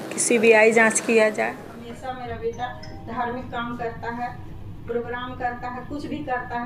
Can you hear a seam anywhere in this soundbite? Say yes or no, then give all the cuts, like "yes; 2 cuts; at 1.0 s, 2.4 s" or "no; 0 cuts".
yes; 1 cut; at 1.7 s